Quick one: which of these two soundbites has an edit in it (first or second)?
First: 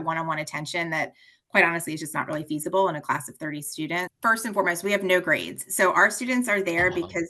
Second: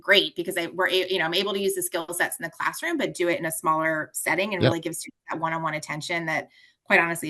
first